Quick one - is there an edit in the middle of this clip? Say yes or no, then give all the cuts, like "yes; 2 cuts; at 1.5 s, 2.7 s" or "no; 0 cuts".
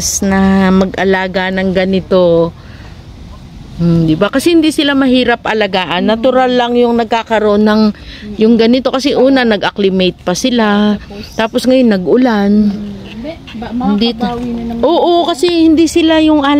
no; 0 cuts